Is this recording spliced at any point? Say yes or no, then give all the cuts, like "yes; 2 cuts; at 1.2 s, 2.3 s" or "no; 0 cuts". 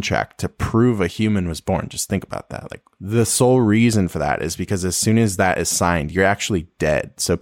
no; 0 cuts